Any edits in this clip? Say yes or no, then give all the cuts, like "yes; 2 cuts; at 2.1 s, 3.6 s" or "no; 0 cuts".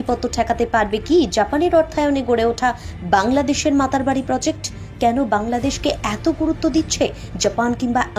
no; 0 cuts